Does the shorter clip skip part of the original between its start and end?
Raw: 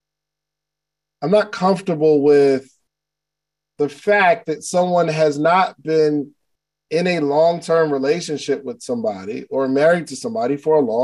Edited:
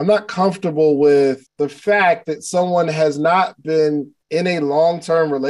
yes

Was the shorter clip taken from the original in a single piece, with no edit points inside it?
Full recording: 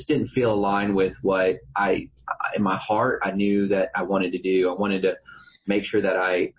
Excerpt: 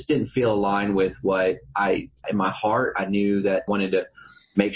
no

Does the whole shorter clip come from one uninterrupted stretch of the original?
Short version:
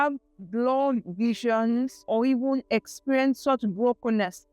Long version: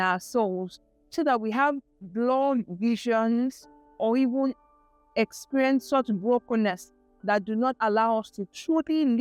no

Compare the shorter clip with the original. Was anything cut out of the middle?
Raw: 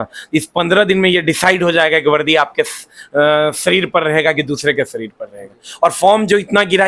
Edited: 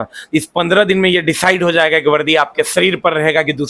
yes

